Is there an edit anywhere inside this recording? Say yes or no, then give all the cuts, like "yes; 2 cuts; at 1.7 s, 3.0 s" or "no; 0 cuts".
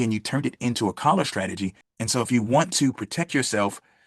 yes; 1 cut; at 1.9 s